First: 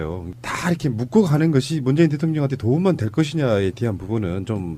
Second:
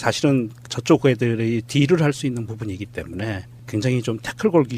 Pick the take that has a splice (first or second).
second